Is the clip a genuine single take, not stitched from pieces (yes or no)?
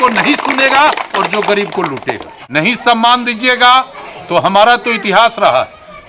no